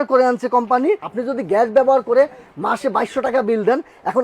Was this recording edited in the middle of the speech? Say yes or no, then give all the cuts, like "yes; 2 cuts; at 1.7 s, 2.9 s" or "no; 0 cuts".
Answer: yes; 1 cut; at 1.1 s